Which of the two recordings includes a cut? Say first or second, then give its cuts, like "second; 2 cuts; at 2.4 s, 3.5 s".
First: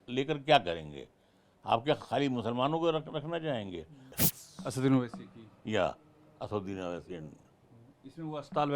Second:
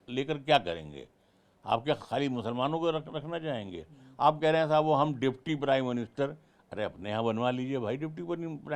first; 1 cut; at 4.0 s